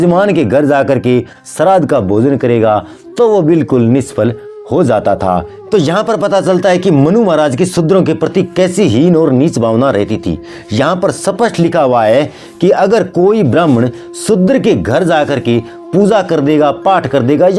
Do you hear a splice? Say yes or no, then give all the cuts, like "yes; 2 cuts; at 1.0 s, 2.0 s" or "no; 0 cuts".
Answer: yes; 1 cut; at 5.5 s